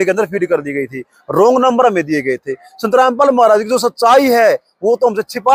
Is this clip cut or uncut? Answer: uncut